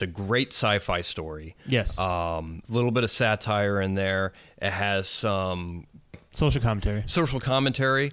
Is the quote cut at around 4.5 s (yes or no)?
no